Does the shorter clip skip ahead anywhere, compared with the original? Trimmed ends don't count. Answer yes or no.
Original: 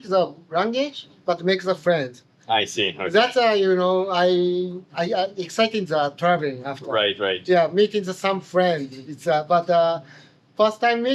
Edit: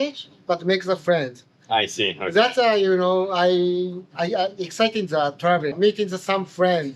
yes